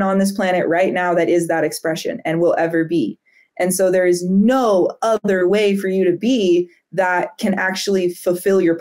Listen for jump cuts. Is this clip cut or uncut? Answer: uncut